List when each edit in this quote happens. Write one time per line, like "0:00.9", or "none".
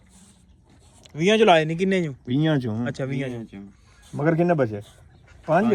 none